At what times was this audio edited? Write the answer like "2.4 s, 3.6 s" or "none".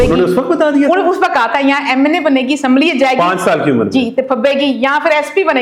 none